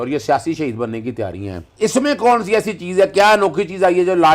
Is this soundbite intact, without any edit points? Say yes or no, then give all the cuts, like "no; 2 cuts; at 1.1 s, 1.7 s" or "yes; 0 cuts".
no; 1 cut; at 1.7 s